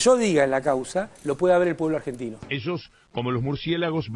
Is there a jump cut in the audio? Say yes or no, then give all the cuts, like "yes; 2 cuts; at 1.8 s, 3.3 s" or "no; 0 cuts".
yes; 1 cut; at 2.4 s